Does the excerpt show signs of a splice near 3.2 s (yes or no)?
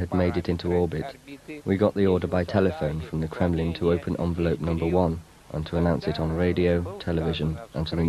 yes